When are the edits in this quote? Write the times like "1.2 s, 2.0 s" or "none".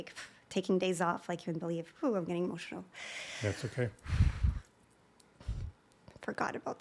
none